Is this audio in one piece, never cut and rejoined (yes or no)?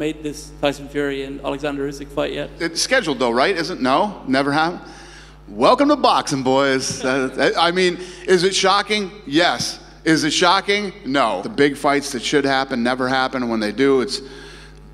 no